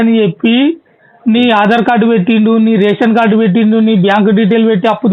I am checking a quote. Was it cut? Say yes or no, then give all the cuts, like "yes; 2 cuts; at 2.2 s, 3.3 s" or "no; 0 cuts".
no; 0 cuts